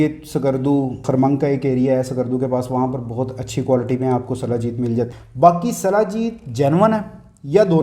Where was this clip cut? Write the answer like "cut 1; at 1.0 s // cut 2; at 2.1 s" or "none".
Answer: cut 1; at 1.0 s // cut 2; at 5.1 s